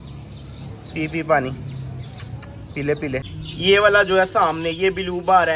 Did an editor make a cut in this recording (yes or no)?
yes